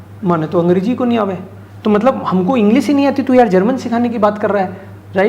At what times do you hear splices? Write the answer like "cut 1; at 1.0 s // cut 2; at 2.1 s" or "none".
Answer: none